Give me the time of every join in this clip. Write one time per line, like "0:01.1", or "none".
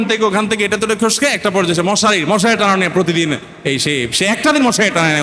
none